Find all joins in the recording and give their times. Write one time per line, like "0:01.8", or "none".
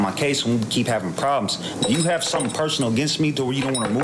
none